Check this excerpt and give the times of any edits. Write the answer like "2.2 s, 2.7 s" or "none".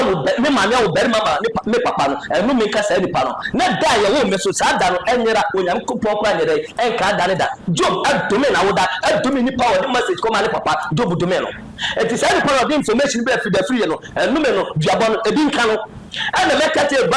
none

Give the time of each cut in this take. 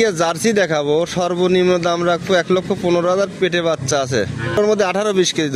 4.6 s

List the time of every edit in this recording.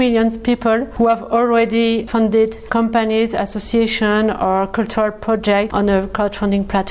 0.9 s, 2.6 s, 5.7 s

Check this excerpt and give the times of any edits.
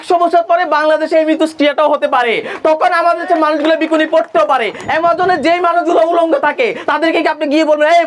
4.8 s

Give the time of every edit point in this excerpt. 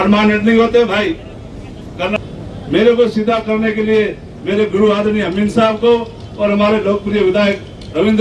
2.2 s

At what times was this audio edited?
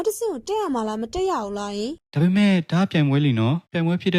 2.0 s

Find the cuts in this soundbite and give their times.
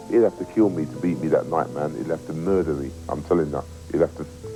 none

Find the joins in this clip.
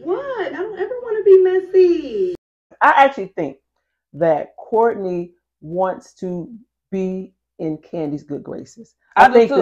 2.7 s

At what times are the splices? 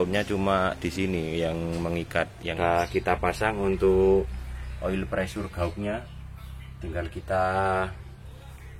2.5 s

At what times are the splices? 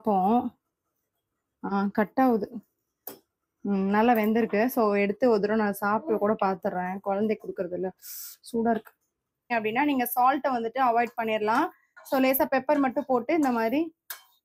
9.5 s

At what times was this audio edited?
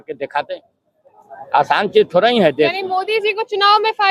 none

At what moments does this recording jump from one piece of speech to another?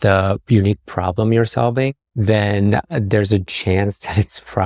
none

